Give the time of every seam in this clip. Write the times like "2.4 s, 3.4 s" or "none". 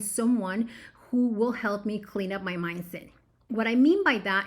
3.4 s